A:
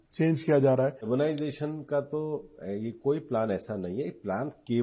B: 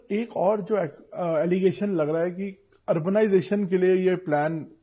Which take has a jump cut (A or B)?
A